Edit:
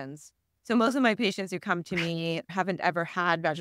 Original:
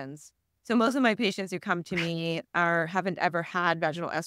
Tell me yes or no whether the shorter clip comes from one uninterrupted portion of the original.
no